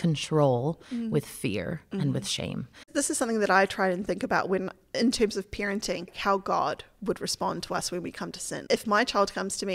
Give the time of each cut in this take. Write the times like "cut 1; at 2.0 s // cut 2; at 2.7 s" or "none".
cut 1; at 2.9 s // cut 2; at 6.1 s // cut 3; at 8.5 s

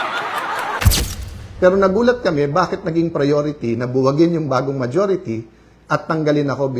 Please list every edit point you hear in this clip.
cut 1; at 1.0 s

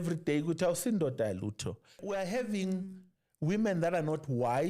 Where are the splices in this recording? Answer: cut 1; at 2.0 s

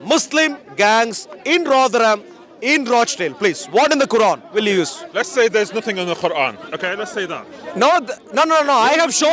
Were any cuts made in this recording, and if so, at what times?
none

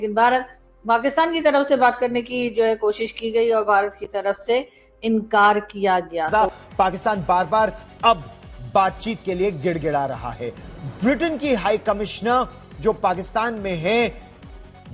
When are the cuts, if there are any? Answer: cut 1; at 6.4 s

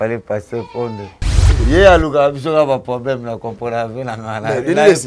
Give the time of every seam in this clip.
cut 1; at 1.6 s

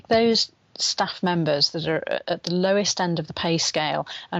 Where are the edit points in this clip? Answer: none

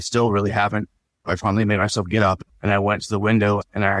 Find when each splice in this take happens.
cut 1; at 1.3 s // cut 2; at 2.5 s

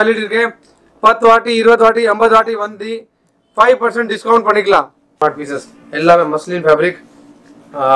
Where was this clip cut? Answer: cut 1; at 5.1 s

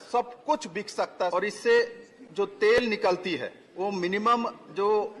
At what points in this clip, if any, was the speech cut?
cut 1; at 1.3 s // cut 2; at 3.6 s

